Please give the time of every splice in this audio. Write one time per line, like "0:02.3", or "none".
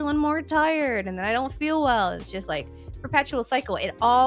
none